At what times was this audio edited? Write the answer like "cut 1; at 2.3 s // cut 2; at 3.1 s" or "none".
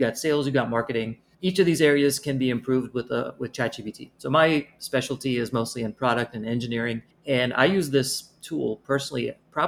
none